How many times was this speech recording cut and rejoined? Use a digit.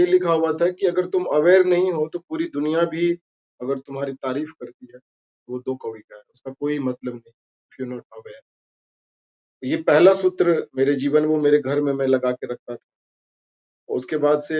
0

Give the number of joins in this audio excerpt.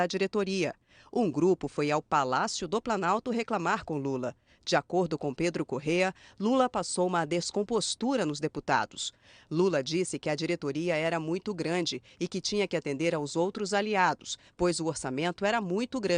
1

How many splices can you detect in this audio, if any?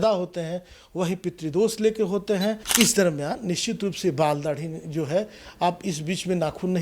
1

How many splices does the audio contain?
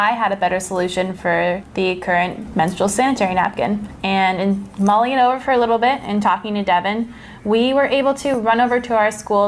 0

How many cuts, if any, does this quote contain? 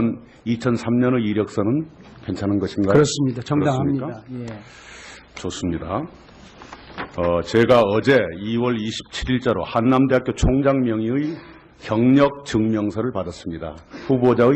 1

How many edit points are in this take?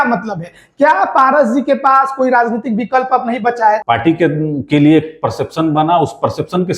1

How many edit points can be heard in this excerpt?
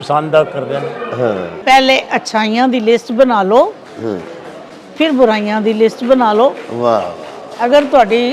1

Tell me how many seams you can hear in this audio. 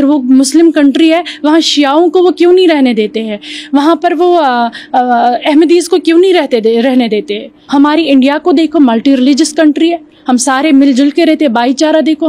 1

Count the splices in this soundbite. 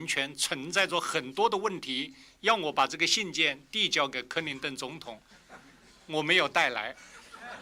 0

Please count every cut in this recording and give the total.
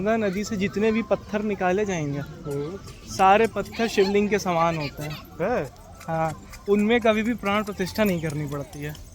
0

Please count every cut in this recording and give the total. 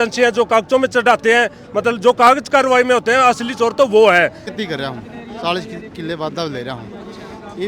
1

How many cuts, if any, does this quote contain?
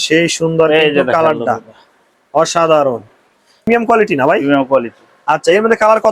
1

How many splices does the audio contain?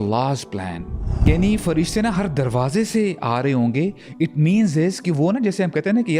1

